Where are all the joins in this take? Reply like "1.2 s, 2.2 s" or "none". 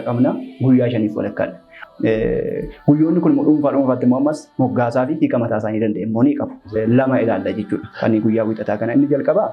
1.8 s, 6.7 s